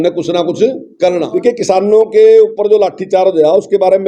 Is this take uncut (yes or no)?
no